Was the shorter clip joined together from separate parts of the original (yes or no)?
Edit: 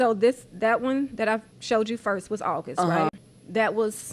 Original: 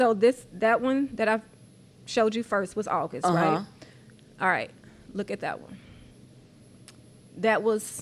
yes